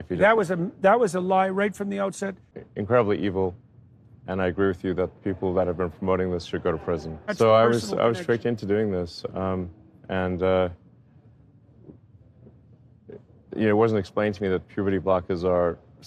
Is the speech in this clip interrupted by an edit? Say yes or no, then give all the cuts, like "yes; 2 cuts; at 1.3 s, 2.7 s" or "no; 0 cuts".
yes; 2 cuts; at 2.5 s, 7.3 s